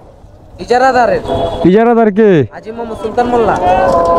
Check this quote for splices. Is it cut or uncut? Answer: uncut